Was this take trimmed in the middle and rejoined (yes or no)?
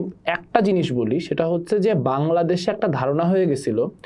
no